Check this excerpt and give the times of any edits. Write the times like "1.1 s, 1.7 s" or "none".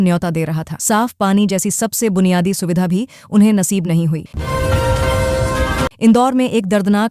none